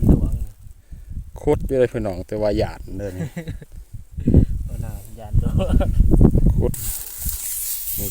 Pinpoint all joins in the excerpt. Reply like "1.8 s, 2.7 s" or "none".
6.7 s